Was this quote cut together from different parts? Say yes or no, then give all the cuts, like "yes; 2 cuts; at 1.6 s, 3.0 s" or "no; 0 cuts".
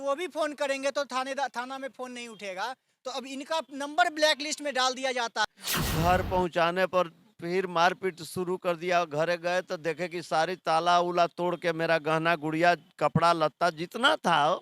yes; 1 cut; at 5.5 s